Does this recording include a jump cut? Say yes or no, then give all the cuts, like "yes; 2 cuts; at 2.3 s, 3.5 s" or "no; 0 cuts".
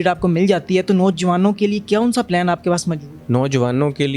yes; 1 cut; at 3.1 s